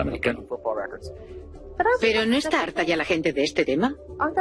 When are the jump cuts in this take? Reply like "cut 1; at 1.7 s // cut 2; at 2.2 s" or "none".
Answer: cut 1; at 2.9 s